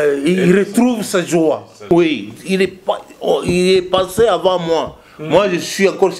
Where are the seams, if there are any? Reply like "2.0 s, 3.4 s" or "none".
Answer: 1.7 s

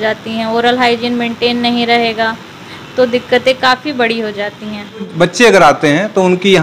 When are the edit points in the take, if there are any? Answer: 5.1 s

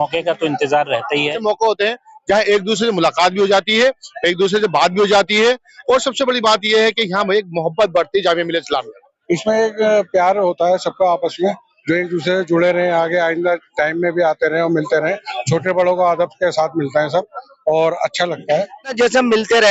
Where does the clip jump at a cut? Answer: 1.4 s, 9.0 s, 18.9 s

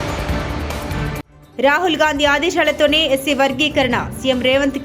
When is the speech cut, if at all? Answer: 1.3 s

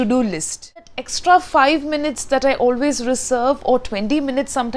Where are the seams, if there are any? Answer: 1.0 s

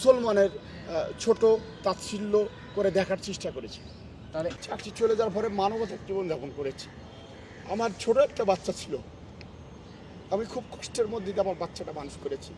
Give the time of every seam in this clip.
4.6 s

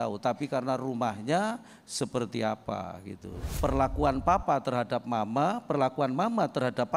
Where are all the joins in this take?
3.3 s

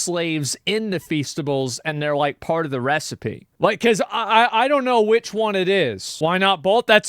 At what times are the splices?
6.0 s

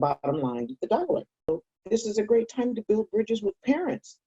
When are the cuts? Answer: 1.5 s

